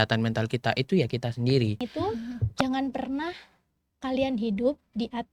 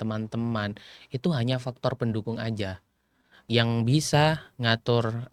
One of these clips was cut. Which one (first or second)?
first